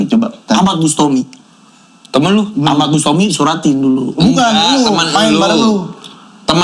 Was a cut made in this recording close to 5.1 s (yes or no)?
no